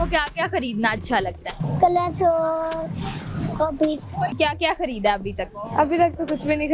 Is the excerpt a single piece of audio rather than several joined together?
no; 2 cuts; at 1.6 s, 4.3 s

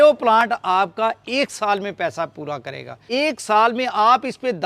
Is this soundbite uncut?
no; 1 cut; at 2.9 s

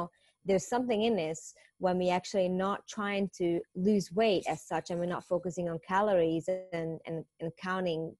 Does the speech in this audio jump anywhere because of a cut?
no; 0 cuts

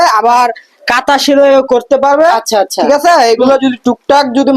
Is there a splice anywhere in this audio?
no; 0 cuts

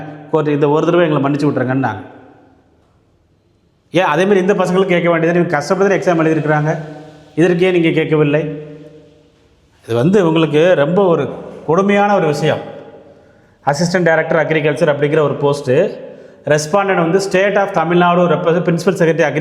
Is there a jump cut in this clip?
no; 0 cuts

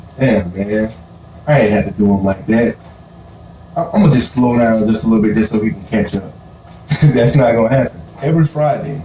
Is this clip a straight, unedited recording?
no; 1 cut; at 8.1 s

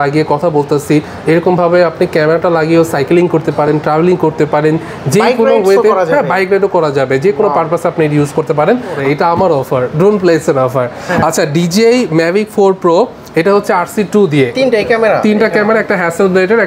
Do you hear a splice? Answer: yes; 2 cuts; at 9.0 s, 14.5 s

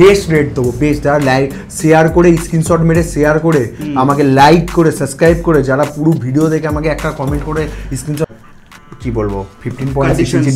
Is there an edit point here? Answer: yes; 1 cut; at 8.3 s

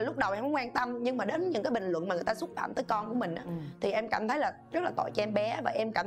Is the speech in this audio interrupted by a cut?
no; 0 cuts

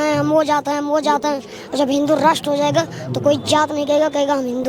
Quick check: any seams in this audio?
no; 0 cuts

